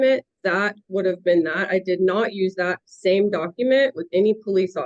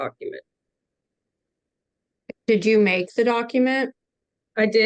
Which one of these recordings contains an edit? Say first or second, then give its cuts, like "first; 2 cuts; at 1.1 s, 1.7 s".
second; 1 cut; at 1.7 s